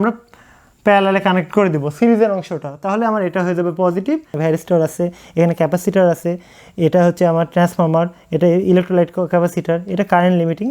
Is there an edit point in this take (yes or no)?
yes